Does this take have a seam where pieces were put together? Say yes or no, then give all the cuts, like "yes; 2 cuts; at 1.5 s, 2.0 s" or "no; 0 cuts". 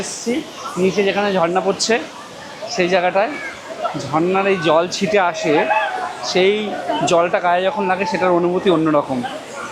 no; 0 cuts